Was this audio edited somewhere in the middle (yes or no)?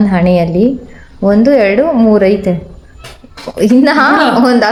no